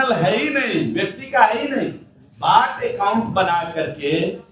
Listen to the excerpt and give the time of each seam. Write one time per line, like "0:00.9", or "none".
none